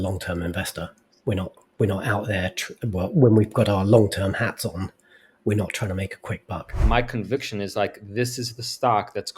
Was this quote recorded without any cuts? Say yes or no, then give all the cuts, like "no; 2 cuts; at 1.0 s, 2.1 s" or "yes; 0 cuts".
no; 2 cuts; at 1.0 s, 6.8 s